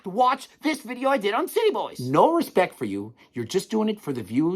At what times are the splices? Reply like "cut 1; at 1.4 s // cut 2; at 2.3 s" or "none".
cut 1; at 1.9 s